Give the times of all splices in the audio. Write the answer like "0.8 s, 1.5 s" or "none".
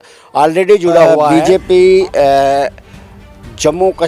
1.2 s